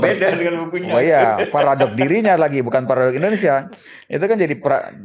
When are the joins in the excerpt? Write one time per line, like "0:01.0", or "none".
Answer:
none